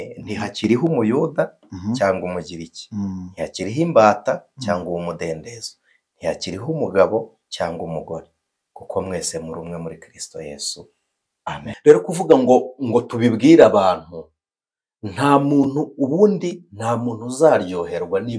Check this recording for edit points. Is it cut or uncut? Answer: cut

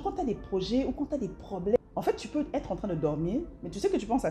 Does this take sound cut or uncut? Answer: cut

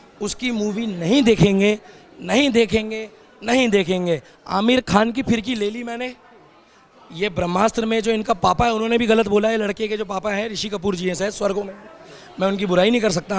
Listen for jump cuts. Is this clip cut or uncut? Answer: uncut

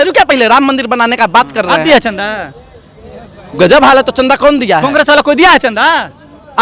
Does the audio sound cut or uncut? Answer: uncut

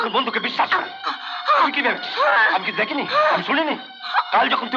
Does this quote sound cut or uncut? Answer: uncut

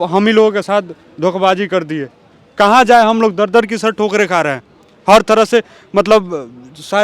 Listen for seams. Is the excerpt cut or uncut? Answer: uncut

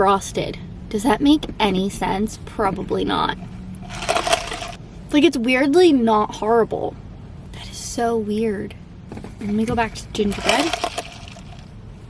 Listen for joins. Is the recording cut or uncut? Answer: uncut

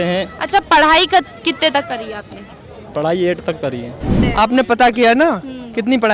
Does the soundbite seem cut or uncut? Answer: cut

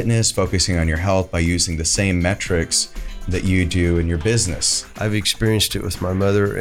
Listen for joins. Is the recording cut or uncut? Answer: cut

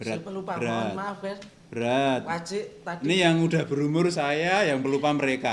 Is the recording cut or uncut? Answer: uncut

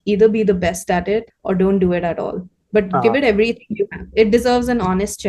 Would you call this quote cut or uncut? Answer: cut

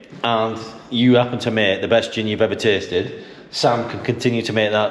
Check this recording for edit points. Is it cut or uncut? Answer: uncut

